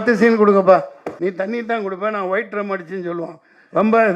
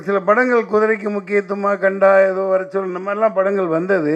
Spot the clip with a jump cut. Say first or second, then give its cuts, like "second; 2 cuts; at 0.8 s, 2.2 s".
first; 1 cut; at 1.0 s